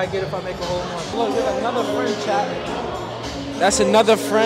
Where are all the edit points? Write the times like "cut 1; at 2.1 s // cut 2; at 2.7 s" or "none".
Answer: cut 1; at 1.1 s